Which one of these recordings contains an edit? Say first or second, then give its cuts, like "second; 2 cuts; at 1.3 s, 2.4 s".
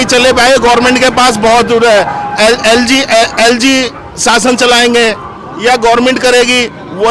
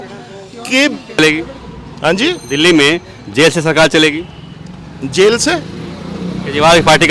second; 1 cut; at 1.2 s